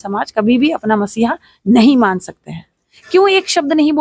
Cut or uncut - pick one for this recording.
uncut